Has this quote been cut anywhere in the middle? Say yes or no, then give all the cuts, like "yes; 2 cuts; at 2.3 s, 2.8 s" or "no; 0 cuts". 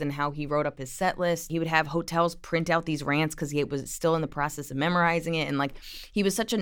yes; 1 cut; at 1.5 s